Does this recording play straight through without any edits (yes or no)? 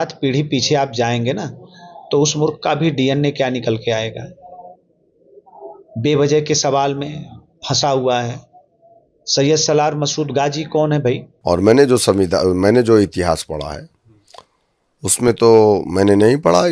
no